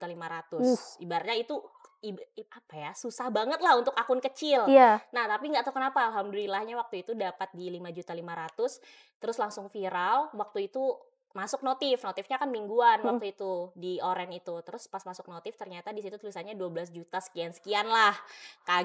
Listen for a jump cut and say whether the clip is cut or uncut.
uncut